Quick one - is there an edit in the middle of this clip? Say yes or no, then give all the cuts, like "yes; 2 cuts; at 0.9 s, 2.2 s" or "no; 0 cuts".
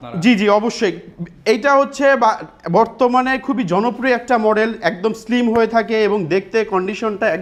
no; 0 cuts